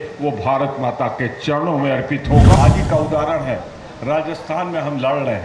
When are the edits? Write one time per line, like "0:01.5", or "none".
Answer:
0:02.6